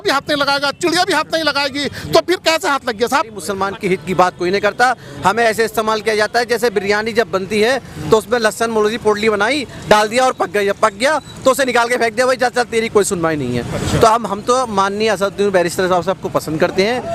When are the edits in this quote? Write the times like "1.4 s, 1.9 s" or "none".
3.5 s